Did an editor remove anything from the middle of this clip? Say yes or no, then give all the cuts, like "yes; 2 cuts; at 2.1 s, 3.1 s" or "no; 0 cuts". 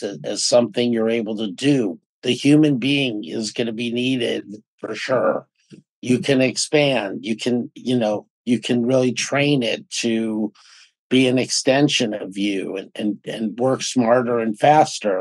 no; 0 cuts